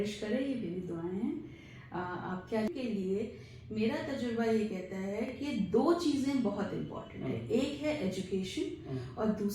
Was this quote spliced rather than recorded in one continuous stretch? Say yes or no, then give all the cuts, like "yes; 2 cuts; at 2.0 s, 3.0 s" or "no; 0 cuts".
yes; 1 cut; at 2.7 s